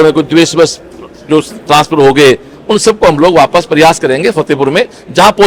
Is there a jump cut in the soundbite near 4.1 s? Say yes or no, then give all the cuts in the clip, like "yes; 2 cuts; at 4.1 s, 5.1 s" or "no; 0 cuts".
no; 0 cuts